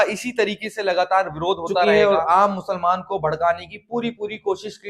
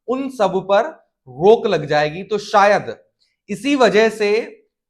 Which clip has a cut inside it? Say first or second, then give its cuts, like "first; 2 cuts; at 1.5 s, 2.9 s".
first; 1 cut; at 1.9 s